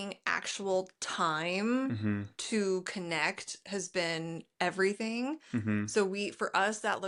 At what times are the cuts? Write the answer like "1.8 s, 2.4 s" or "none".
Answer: none